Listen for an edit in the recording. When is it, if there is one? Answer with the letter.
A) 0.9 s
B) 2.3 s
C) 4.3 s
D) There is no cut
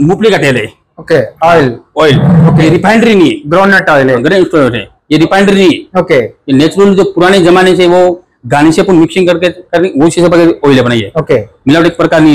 D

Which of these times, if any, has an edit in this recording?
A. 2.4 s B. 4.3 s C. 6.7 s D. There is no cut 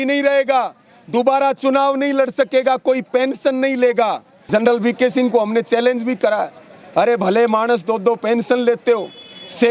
B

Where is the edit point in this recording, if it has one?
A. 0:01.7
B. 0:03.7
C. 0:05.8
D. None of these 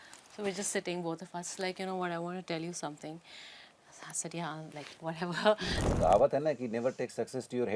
C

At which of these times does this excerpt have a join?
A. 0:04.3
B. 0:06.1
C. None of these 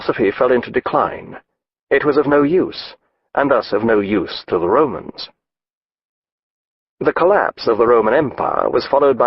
A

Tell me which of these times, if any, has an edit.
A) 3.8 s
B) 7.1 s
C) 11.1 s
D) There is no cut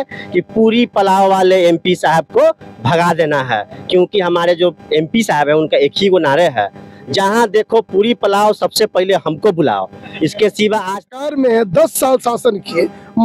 C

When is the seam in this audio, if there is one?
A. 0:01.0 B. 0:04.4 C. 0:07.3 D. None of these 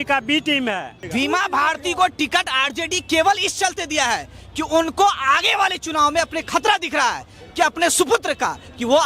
A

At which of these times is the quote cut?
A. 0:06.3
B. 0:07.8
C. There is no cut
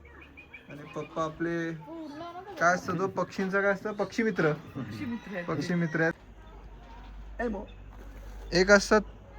A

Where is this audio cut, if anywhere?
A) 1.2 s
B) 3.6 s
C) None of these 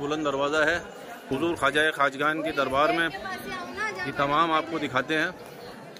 A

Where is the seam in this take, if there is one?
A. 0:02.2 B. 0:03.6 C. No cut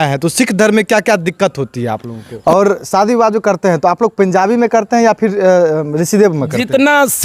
A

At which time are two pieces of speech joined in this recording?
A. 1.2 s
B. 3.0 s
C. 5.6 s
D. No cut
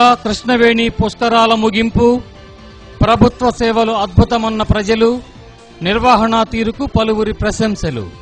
D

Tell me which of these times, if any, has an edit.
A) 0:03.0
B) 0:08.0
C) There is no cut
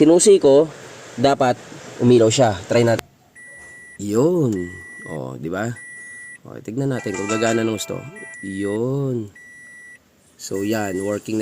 A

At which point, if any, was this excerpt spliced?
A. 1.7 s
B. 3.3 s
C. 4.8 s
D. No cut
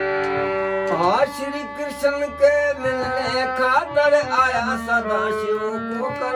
D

